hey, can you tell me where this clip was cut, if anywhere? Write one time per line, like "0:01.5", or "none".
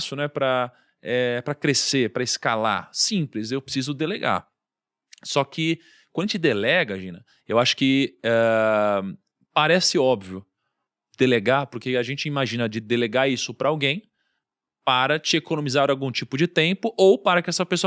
none